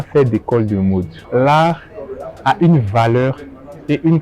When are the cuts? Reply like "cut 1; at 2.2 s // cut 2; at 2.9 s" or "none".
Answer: cut 1; at 1.2 s